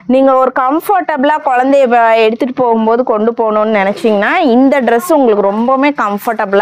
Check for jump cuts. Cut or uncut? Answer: uncut